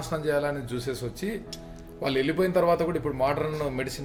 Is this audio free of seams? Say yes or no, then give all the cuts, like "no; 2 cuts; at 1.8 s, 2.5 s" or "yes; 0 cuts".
yes; 0 cuts